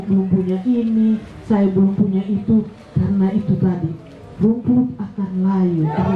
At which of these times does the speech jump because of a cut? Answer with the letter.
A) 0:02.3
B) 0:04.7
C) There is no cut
C